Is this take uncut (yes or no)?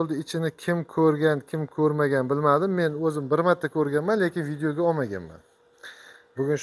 yes